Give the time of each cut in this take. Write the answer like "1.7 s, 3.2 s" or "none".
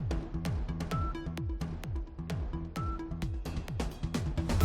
2.6 s